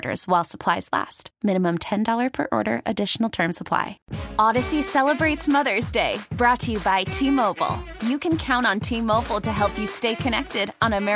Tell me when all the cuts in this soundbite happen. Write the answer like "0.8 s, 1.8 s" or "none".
4.0 s

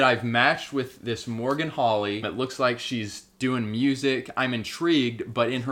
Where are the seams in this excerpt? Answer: 2.3 s

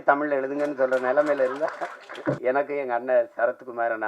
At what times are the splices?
2.4 s

